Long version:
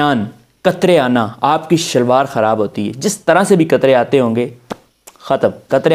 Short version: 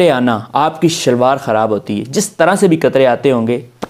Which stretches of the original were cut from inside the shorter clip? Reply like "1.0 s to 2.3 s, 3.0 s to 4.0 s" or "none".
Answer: none